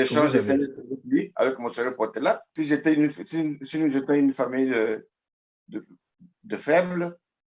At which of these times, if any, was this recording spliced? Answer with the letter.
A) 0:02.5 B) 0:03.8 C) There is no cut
A